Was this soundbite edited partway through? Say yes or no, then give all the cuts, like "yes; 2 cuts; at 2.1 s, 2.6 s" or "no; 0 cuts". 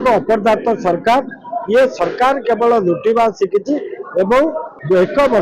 no; 0 cuts